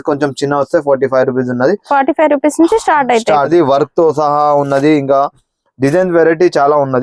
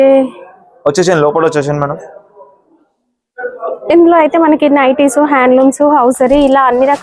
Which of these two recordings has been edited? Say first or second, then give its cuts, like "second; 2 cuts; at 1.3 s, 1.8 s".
first; 1 cut; at 3.5 s